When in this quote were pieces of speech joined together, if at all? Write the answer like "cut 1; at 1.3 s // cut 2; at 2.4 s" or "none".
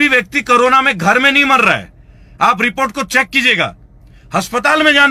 none